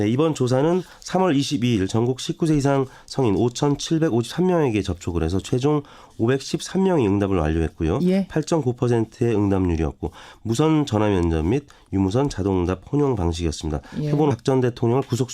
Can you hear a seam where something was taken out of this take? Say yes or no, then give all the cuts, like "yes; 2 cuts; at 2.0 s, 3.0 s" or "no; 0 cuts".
no; 0 cuts